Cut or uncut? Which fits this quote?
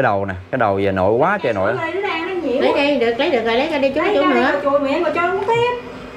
uncut